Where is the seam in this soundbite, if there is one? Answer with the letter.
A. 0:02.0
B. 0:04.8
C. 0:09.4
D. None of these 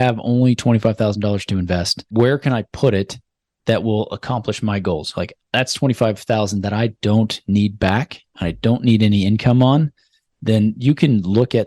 A